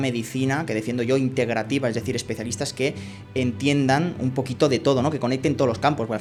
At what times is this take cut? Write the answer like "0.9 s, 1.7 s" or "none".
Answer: none